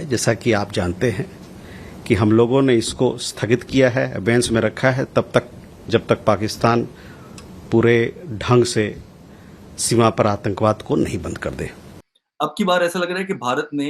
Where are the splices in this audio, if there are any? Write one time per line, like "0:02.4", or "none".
0:11.9